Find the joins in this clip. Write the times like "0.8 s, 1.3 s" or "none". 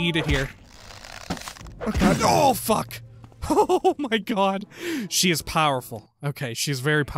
2.2 s